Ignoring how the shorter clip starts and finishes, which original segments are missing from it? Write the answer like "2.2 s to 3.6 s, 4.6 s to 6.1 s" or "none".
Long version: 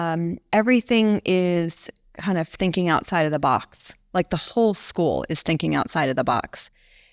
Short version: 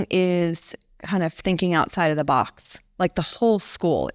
none